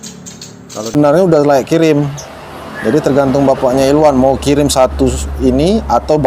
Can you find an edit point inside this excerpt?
yes; 1 cut; at 0.9 s

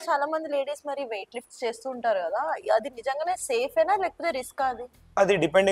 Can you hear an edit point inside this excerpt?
no; 0 cuts

